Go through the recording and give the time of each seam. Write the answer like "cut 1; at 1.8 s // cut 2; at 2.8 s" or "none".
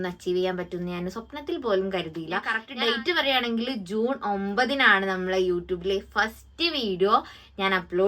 cut 1; at 2.6 s